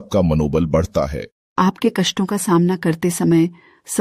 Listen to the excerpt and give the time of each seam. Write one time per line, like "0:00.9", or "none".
0:01.4